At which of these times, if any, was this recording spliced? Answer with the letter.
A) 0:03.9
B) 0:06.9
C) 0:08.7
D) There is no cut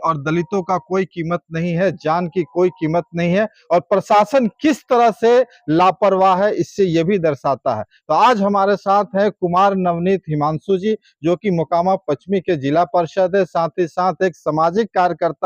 D